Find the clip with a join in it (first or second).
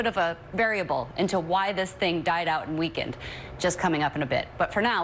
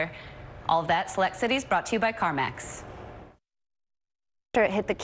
second